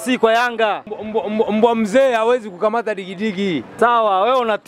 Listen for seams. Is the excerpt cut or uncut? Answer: cut